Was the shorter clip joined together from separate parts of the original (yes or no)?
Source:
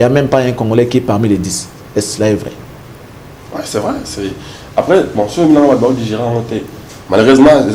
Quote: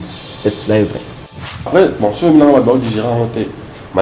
yes